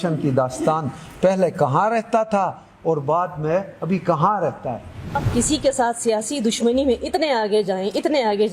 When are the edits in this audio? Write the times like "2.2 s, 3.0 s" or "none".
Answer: 5.2 s